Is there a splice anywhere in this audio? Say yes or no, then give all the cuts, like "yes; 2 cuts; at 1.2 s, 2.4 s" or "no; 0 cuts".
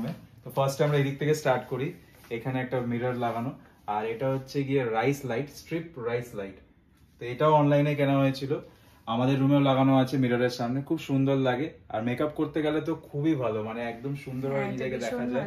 no; 0 cuts